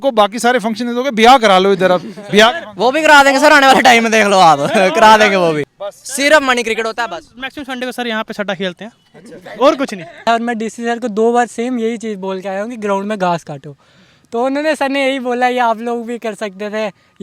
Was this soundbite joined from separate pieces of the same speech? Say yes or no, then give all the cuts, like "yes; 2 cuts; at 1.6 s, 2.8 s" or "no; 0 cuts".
yes; 2 cuts; at 5.8 s, 10.2 s